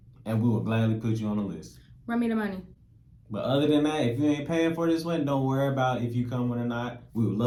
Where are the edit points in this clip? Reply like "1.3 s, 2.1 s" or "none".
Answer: none